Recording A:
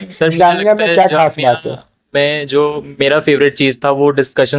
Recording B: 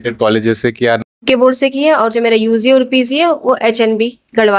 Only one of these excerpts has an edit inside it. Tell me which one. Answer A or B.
B